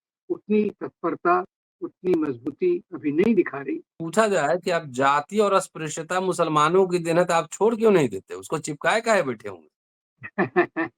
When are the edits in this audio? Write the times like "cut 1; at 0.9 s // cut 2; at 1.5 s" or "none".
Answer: cut 1; at 4.0 s